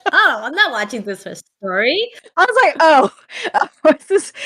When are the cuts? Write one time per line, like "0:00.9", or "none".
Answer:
0:02.2